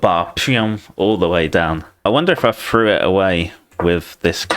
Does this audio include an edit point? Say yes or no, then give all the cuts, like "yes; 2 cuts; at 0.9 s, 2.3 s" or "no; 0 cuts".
yes; 1 cut; at 2.1 s